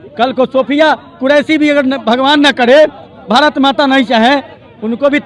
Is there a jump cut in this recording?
no; 0 cuts

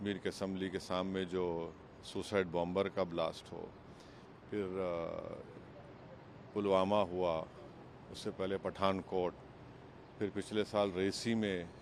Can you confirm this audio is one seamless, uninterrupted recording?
yes; 0 cuts

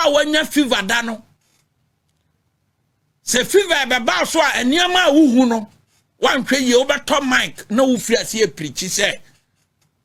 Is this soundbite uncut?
yes; 0 cuts

